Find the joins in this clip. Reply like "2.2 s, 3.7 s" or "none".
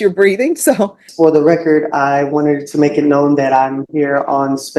1.0 s